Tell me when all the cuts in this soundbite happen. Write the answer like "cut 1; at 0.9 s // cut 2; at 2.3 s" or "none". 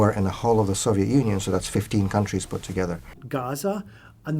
cut 1; at 3.1 s